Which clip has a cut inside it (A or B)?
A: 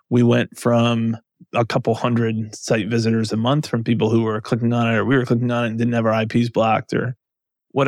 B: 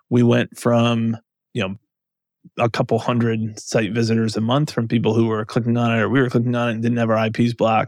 A